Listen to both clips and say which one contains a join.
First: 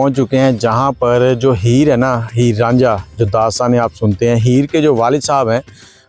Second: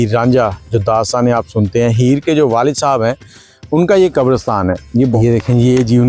second; 1 cut; at 5.2 s

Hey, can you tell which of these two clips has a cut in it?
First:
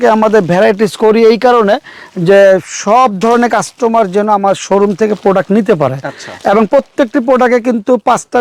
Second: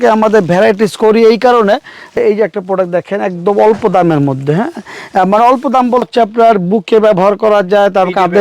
second; 2 cuts; at 2.2 s, 6.1 s

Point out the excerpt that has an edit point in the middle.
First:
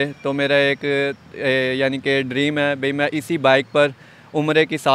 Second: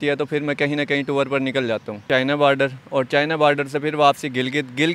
second; 1 cut; at 2.0 s

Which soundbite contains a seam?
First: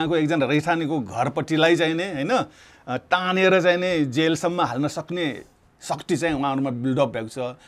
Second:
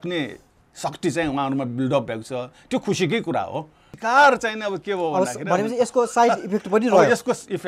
second; 1 cut; at 3.9 s

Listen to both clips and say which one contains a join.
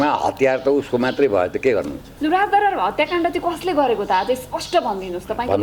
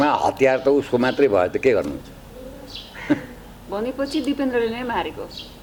first; 1 cut; at 2.1 s

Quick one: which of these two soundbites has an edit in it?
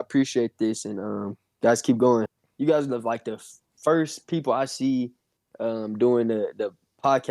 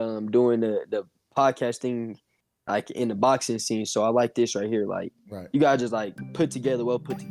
first; 1 cut; at 2.4 s

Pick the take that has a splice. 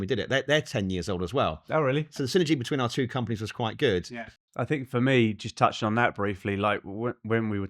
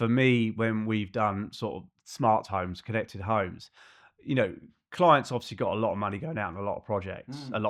first; 1 cut; at 4.1 s

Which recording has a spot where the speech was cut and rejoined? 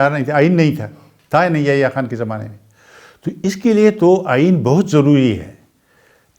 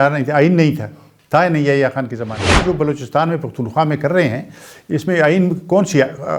second; 1 cut; at 2.6 s

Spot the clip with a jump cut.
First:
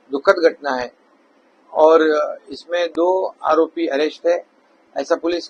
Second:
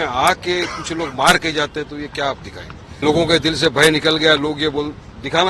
second; 1 cut; at 3.0 s

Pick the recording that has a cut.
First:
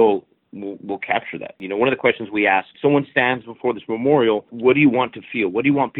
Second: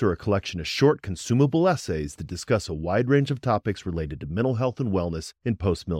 first; 3 cuts; at 1.6 s, 2.7 s, 4.5 s

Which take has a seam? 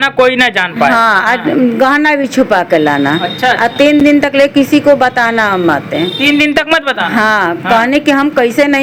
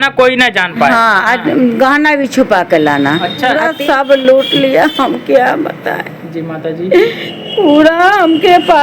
second; 1 cut; at 3.7 s

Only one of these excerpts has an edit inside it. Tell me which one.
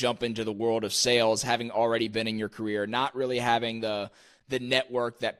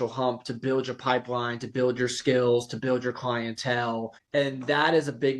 second; 1 cut; at 4.2 s

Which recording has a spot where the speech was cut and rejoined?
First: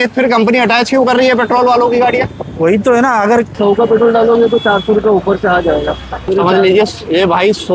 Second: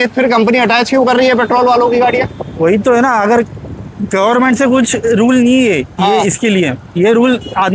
first; 2 cuts; at 3.6 s, 6.3 s

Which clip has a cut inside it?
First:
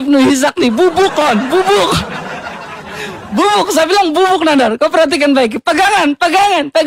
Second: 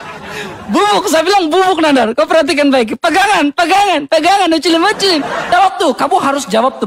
second; 1 cut; at 5.5 s

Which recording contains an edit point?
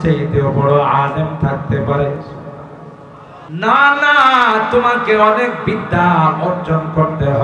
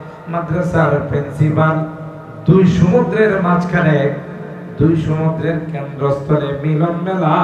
first; 1 cut; at 3.4 s

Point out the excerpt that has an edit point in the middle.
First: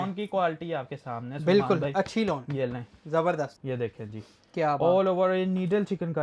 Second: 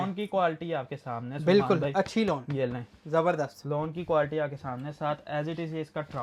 first; 1 cut; at 3.6 s

